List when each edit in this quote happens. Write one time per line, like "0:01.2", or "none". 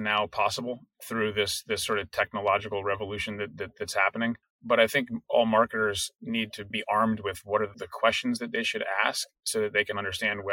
0:04.5
0:06.7
0:07.8